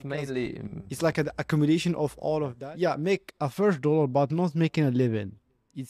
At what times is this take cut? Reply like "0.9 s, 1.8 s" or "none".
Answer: 2.5 s